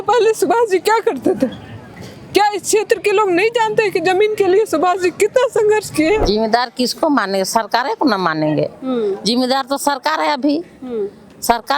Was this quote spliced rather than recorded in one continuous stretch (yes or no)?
yes